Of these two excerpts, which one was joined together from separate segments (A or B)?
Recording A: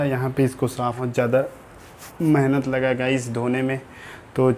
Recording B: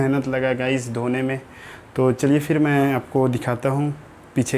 A